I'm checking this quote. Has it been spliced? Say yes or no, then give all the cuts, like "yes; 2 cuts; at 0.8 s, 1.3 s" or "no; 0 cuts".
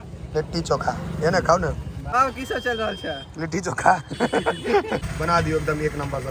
yes; 2 cuts; at 1.9 s, 5.0 s